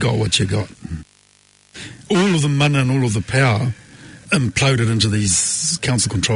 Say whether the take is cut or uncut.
cut